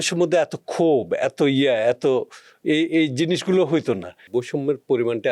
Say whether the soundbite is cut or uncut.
cut